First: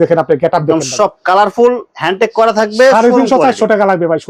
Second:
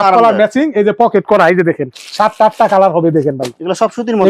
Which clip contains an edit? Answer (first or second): second